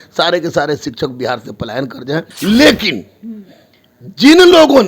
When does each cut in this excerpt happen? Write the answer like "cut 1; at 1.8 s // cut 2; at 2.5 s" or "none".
cut 1; at 2.3 s